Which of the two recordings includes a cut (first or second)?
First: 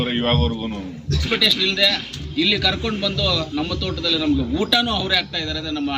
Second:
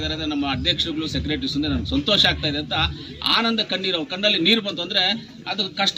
first